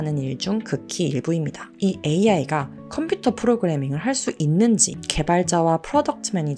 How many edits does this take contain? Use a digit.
1